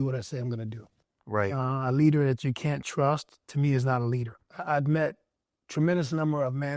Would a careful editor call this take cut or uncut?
cut